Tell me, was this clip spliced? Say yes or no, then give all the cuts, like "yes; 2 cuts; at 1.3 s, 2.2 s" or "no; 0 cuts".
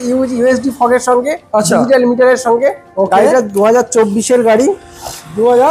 no; 0 cuts